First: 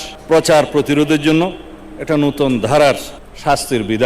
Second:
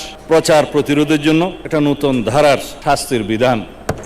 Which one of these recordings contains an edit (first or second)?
second